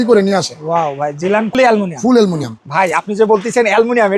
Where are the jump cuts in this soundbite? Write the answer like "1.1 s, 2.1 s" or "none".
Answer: 1.5 s